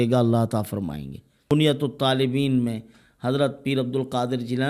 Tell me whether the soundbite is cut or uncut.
cut